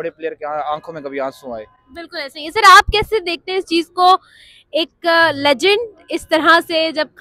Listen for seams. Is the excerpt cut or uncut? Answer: uncut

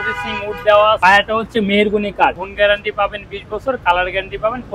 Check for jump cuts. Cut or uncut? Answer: cut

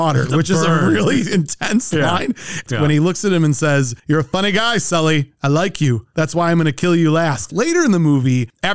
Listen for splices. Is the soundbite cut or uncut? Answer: cut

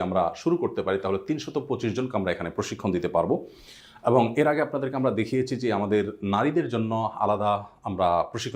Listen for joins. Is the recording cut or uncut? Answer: uncut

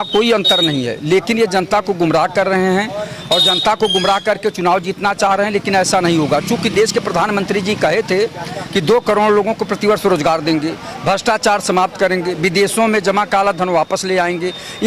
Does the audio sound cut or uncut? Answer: uncut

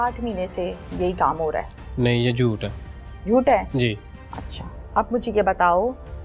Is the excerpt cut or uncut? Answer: uncut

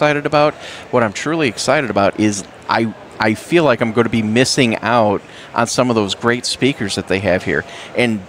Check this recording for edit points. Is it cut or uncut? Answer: uncut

